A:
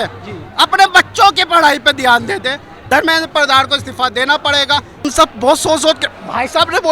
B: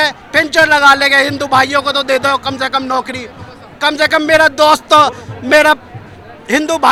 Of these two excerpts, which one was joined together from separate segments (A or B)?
A